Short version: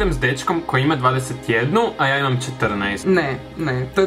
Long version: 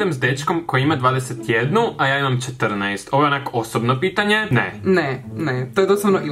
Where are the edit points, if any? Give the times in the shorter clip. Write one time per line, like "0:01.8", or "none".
0:03.0

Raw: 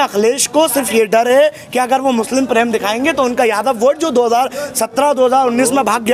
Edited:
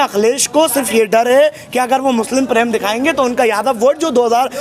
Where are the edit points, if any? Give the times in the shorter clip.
none

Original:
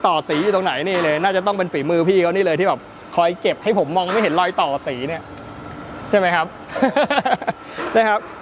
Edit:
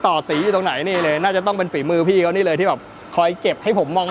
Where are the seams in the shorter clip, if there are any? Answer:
none

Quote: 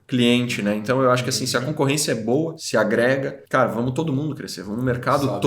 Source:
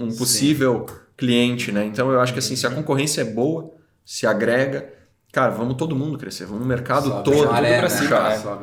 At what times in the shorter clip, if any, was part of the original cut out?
0:02.6
0:03.4

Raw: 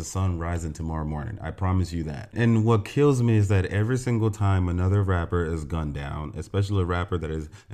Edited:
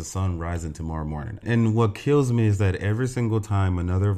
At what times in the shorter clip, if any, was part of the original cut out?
0:01.3

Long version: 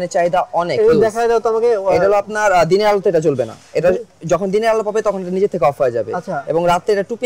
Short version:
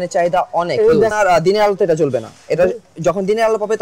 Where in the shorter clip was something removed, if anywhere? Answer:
0:01.1

